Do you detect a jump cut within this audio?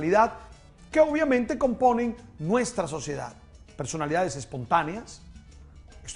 no; 0 cuts

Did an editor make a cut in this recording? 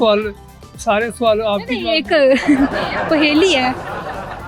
no; 0 cuts

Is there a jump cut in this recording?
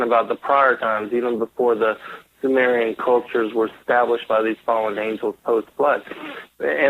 yes; 1 cut; at 3.5 s

